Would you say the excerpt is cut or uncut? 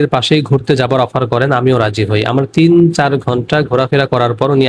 uncut